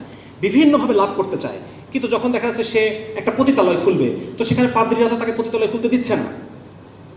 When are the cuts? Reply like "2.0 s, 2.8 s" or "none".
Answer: none

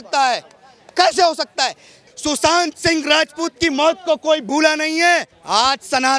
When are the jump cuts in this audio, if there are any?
2.0 s, 5.3 s

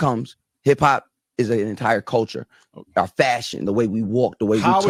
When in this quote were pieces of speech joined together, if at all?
none

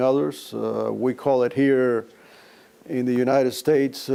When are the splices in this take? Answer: none

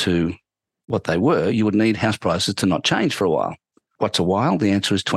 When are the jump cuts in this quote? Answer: 3.8 s

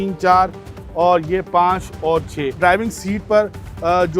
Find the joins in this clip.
2.6 s

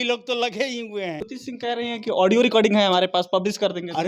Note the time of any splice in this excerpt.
1.4 s

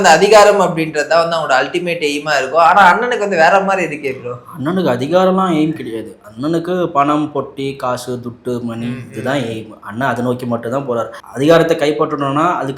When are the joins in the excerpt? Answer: 11.2 s

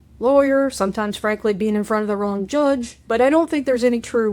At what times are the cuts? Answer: 2.9 s

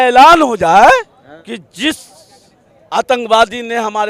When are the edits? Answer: 1.3 s

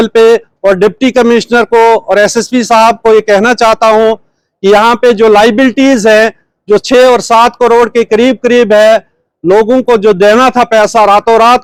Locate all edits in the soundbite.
none

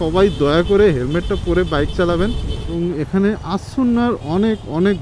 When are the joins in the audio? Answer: 2.7 s

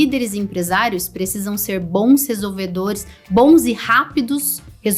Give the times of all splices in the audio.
none

